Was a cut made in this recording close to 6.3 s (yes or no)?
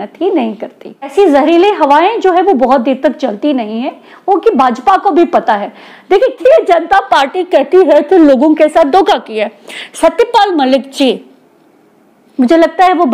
yes